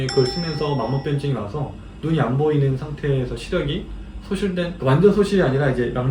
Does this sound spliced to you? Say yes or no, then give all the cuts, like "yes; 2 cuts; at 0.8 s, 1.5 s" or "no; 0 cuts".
no; 0 cuts